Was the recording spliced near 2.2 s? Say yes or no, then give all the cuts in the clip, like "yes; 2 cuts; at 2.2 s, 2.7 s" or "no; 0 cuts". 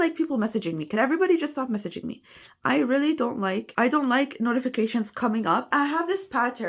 no; 0 cuts